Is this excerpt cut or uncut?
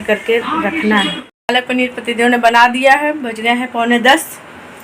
cut